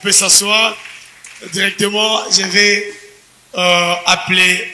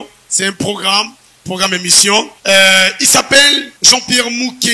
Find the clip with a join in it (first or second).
second